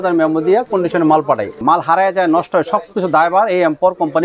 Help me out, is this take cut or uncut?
cut